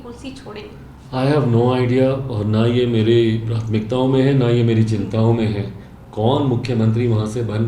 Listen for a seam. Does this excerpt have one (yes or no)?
no